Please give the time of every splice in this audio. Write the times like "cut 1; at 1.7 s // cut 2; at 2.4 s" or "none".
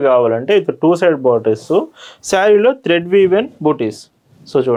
none